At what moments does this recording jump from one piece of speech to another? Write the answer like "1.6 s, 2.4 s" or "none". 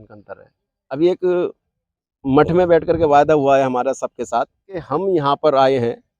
1.0 s, 4.8 s